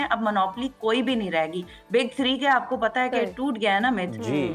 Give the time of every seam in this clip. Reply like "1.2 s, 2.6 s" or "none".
none